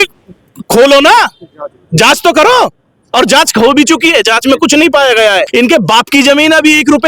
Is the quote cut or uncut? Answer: cut